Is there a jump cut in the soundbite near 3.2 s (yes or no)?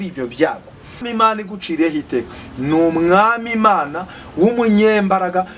no